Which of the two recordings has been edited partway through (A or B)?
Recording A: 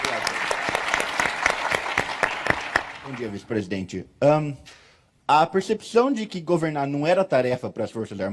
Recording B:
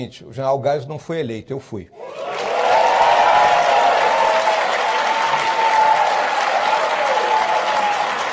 B